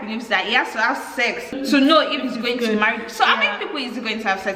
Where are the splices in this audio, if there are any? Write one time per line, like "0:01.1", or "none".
none

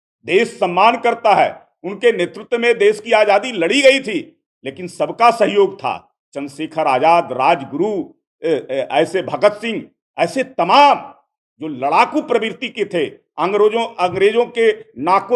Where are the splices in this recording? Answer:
none

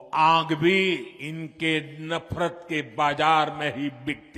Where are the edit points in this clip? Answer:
0:01.2

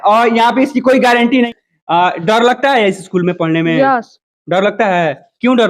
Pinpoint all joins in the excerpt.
0:01.5

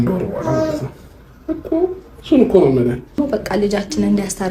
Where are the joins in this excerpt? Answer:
0:03.2

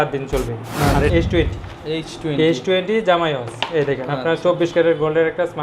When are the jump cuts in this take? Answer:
0:01.1

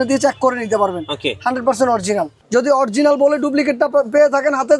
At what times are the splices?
0:02.3

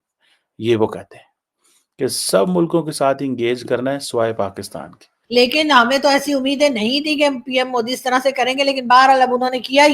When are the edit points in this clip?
0:05.1

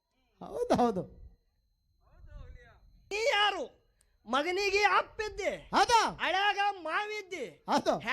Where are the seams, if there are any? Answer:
0:03.1

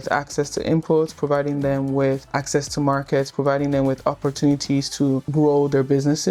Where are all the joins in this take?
0:02.3
0:05.3

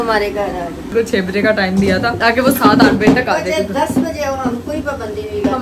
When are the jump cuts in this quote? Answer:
0:00.9

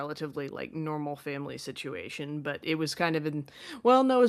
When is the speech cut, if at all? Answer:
none

